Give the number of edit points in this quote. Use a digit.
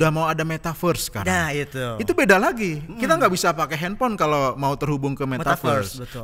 0